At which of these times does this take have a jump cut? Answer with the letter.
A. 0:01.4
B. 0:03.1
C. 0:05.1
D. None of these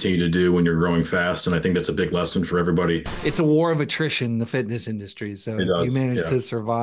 B